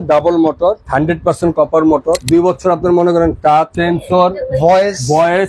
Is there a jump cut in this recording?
yes; 3 cuts; at 0.8 s, 2.2 s, 3.7 s

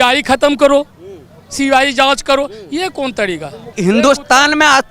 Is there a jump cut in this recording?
yes; 1 cut; at 3.7 s

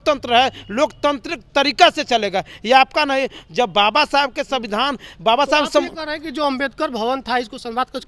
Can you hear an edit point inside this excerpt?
no; 0 cuts

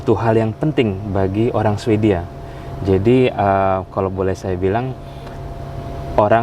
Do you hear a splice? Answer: no; 0 cuts

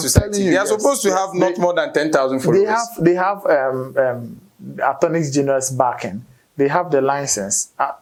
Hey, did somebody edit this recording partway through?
no; 0 cuts

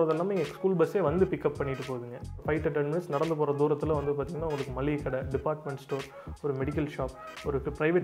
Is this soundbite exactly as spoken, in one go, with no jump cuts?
no; 1 cut; at 2.4 s

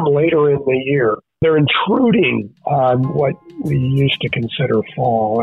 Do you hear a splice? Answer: yes; 1 cut; at 1.4 s

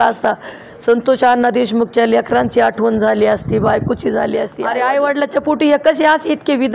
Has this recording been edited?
yes; 1 cut; at 4.6 s

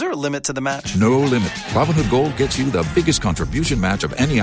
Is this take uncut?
yes; 0 cuts

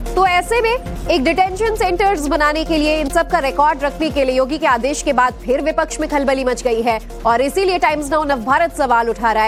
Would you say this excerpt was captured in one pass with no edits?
yes; 0 cuts

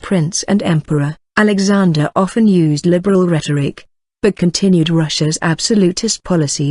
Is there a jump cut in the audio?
yes; 1 cut; at 5.6 s

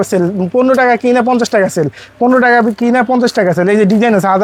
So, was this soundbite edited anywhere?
no; 0 cuts

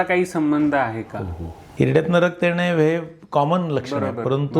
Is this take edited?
yes; 1 cut; at 1.6 s

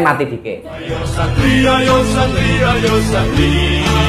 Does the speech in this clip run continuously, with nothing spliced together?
no; 1 cut; at 1.0 s

